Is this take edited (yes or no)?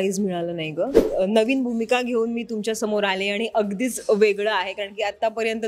yes